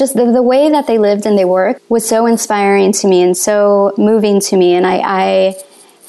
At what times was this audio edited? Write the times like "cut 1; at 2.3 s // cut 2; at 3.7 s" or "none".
cut 1; at 1.8 s